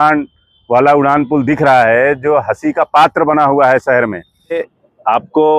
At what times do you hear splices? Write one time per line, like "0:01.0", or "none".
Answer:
0:04.7